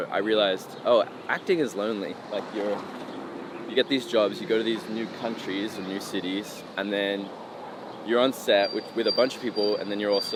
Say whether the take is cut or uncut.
uncut